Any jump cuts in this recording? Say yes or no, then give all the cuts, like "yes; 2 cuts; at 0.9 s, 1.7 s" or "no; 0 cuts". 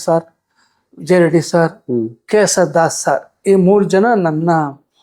no; 0 cuts